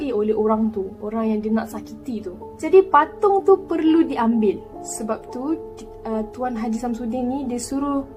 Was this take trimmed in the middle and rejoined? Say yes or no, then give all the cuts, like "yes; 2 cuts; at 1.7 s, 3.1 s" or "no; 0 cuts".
no; 0 cuts